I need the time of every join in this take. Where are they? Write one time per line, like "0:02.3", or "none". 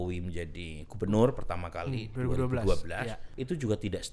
0:03.2